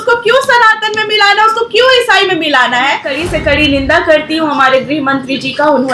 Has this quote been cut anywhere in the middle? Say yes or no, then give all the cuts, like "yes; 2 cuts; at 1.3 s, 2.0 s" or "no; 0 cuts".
yes; 1 cut; at 3.1 s